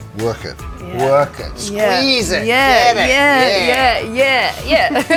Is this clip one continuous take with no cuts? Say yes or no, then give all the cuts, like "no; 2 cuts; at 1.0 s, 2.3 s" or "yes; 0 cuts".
yes; 0 cuts